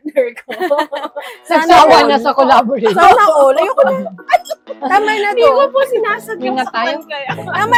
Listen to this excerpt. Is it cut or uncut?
uncut